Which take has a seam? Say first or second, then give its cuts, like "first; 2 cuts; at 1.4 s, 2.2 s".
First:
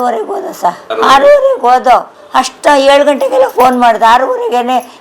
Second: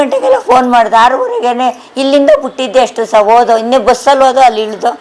first; 2 cuts; at 0.8 s, 2.2 s